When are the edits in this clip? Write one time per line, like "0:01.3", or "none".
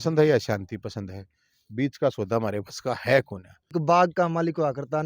0:03.7